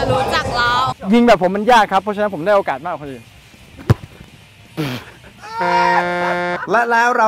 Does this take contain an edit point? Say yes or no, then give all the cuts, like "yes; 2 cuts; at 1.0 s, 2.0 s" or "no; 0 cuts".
yes; 2 cuts; at 0.9 s, 3.3 s